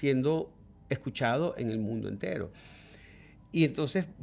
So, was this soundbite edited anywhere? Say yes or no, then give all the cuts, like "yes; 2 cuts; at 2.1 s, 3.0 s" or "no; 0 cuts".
no; 0 cuts